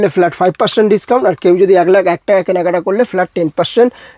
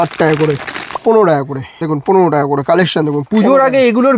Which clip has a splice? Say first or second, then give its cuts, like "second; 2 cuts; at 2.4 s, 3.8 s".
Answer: second; 3 cuts; at 1.0 s, 1.7 s, 3.2 s